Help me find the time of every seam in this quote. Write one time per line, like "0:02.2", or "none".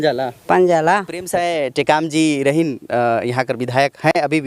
0:01.3